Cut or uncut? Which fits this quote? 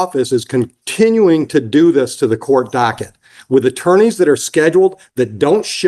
uncut